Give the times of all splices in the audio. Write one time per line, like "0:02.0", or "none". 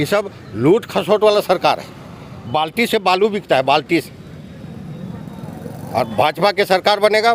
none